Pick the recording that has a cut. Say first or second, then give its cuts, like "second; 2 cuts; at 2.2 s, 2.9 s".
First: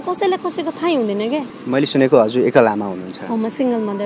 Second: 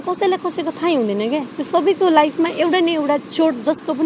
first; 1 cut; at 1.5 s